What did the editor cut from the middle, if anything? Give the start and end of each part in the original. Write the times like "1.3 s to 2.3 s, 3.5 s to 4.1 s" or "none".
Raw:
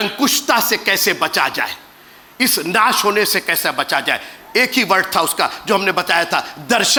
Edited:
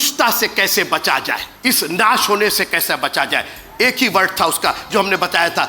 1.8 s to 2.2 s